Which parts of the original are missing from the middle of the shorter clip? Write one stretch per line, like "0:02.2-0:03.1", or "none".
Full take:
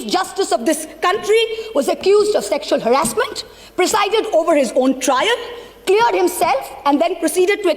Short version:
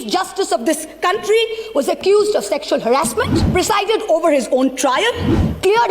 0:03.4-0:03.6